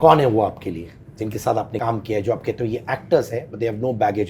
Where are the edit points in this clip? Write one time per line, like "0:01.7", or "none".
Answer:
0:01.7

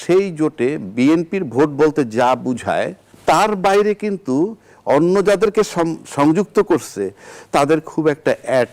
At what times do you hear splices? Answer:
0:03.0

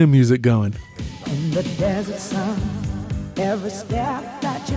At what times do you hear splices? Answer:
0:01.3

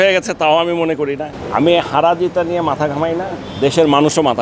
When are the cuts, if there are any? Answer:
0:01.3

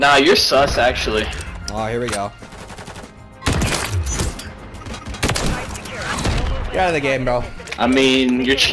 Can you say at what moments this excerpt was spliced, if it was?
0:02.5
0:05.0
0:07.6

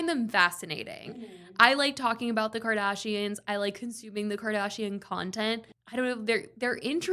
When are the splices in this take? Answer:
0:05.6

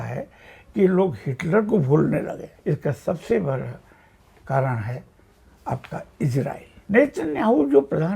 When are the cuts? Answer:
0:02.5
0:06.7

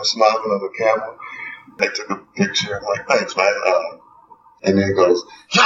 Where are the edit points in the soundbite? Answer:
0:01.8

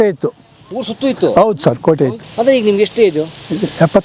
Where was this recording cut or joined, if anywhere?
0:02.2

